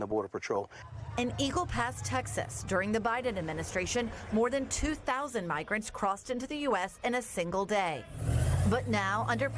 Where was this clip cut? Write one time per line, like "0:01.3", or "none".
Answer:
0:01.0